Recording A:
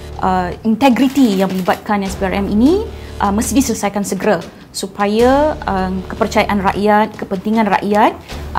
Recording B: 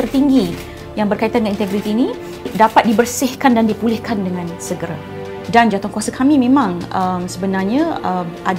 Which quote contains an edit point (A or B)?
B